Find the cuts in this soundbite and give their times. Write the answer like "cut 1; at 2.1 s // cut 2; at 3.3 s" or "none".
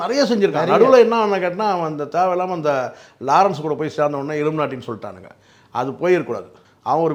none